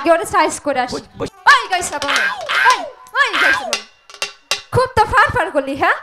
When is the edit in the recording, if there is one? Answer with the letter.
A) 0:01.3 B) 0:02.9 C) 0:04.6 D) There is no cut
A